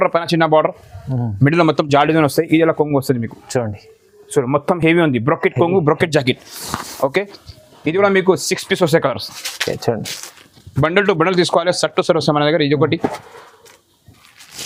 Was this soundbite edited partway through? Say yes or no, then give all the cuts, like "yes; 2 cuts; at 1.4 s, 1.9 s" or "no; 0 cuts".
no; 0 cuts